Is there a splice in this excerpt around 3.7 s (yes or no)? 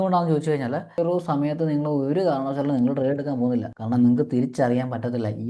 yes